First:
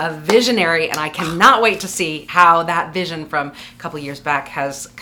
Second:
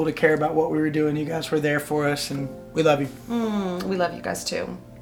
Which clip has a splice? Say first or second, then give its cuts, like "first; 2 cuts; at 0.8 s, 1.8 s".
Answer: first; 1 cut; at 2.2 s